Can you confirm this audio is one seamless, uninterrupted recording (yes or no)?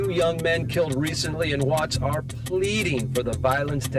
yes